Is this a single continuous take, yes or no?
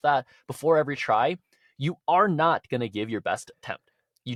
yes